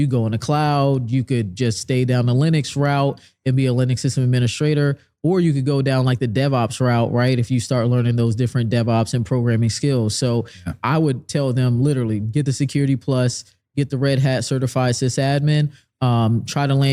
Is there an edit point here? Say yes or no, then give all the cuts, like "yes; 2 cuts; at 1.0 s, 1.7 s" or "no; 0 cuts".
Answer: no; 0 cuts